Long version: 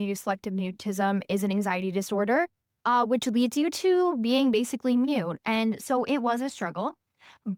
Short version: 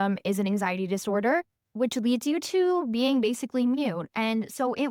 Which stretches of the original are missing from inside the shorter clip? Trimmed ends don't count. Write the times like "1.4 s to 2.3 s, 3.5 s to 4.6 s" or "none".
2.8 s to 3.1 s